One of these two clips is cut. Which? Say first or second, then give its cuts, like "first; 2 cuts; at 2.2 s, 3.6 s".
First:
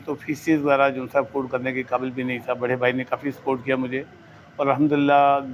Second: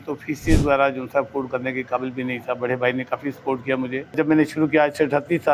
second; 1 cut; at 4.1 s